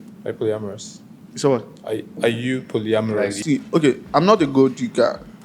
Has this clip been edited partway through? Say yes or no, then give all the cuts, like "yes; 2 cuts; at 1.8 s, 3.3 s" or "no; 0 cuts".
yes; 1 cut; at 3.3 s